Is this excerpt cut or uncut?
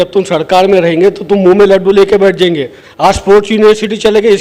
cut